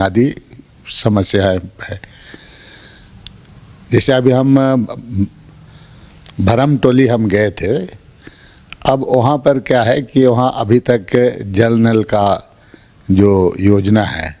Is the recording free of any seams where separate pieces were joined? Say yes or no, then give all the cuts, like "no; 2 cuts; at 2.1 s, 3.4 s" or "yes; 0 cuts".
yes; 0 cuts